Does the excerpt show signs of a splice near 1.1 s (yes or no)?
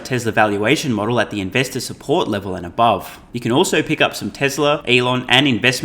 no